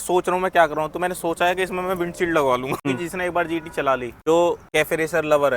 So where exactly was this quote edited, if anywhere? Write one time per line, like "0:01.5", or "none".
0:02.8
0:04.1
0:04.6